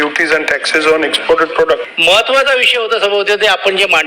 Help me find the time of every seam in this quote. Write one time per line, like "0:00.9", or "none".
0:01.9